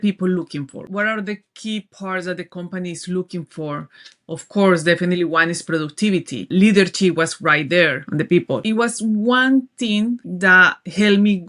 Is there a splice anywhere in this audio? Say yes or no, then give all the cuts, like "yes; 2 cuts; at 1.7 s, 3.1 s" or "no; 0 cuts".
yes; 4 cuts; at 0.9 s, 6.4 s, 8.4 s, 10.3 s